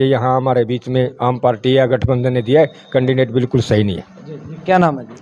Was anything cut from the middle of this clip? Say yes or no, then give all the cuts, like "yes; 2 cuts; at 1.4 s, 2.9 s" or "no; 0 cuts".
no; 0 cuts